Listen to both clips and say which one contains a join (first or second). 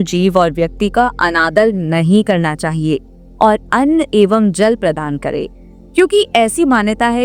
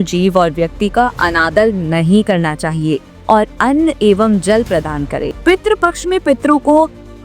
second